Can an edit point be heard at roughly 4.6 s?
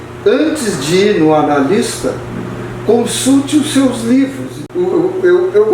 yes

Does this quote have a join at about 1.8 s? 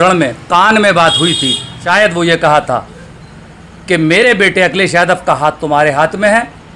yes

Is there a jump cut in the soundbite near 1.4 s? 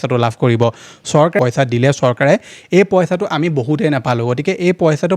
yes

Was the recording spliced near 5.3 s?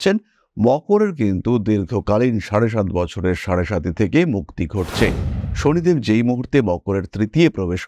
yes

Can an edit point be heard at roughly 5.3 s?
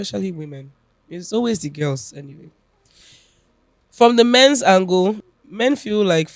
yes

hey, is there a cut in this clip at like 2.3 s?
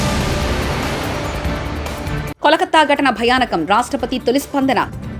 yes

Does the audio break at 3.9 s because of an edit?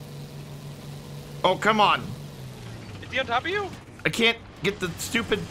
yes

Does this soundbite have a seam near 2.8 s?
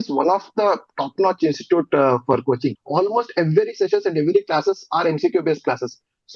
yes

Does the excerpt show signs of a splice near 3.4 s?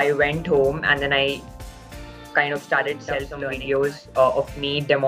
yes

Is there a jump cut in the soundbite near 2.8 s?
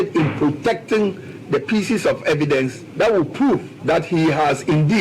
yes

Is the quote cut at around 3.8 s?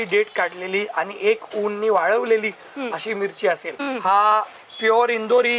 yes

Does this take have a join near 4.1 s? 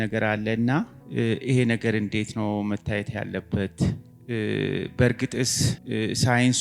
yes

